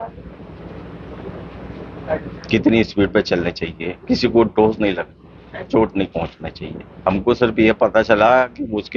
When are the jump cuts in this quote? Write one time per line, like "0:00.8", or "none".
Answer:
0:06.9